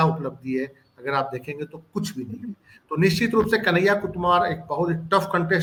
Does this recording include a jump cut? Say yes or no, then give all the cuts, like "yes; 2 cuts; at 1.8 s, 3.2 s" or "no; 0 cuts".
no; 0 cuts